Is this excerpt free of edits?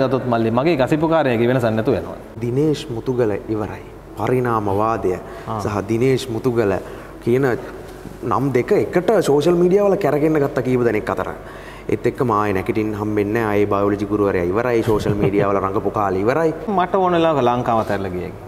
no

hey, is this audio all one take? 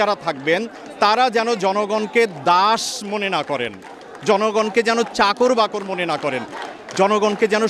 yes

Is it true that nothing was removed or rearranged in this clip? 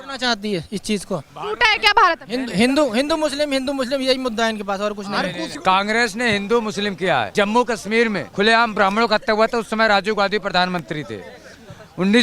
no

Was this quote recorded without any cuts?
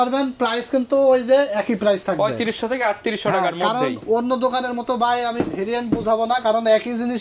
yes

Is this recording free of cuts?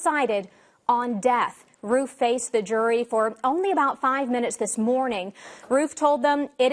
yes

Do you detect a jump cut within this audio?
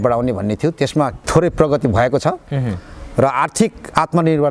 yes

